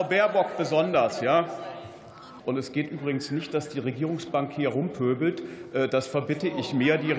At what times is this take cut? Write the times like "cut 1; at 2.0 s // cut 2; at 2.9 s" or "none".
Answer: cut 1; at 2.3 s